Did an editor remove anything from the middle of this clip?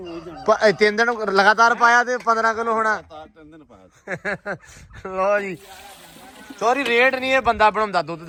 no; 0 cuts

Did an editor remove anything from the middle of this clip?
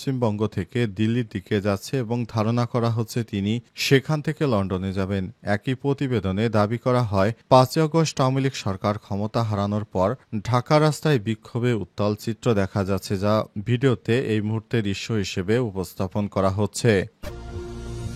yes; 1 cut; at 17.1 s

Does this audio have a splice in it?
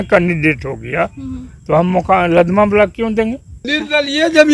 yes; 1 cut; at 3.5 s

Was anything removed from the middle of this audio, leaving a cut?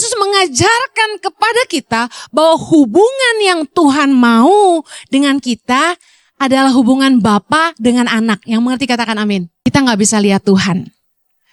yes; 1 cut; at 9.5 s

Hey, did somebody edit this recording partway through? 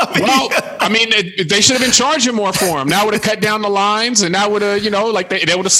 no; 0 cuts

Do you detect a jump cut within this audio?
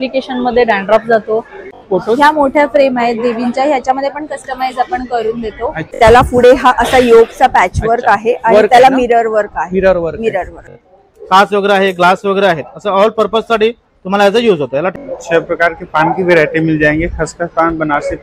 yes; 4 cuts; at 1.6 s, 5.8 s, 10.7 s, 14.9 s

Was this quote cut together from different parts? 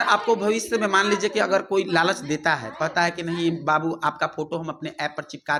no; 0 cuts

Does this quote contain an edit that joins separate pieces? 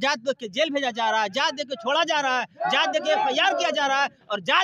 no; 0 cuts

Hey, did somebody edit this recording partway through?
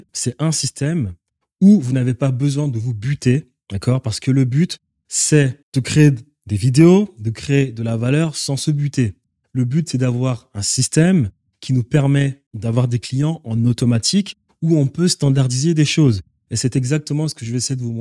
no; 0 cuts

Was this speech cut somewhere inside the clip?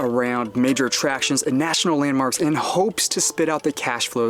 no; 0 cuts

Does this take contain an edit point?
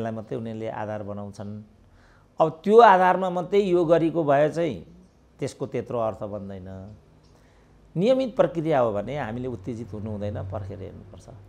no; 0 cuts

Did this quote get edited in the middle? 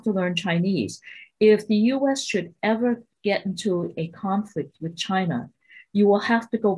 no; 0 cuts

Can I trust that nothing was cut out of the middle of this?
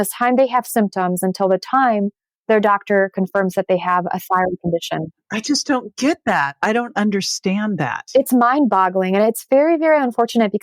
yes; 0 cuts

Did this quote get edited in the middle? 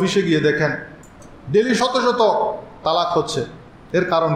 yes; 1 cut; at 1.1 s

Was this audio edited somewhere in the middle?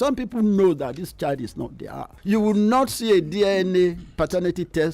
yes; 1 cut; at 2.1 s

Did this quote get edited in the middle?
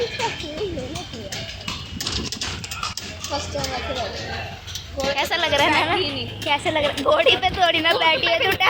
no; 0 cuts

